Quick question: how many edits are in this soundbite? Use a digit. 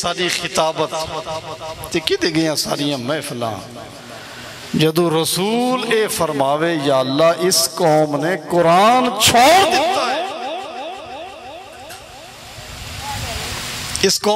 0